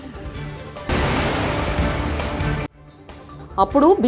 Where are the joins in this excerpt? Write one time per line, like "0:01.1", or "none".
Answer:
0:00.9
0:02.9